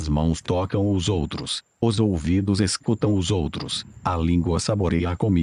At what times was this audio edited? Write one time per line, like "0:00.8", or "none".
none